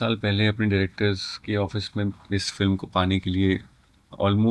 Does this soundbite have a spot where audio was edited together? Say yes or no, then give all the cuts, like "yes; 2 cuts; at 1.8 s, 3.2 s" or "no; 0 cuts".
no; 0 cuts